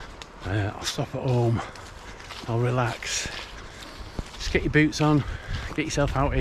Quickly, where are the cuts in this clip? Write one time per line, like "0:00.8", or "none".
none